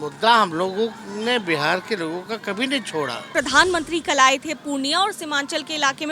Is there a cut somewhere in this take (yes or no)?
yes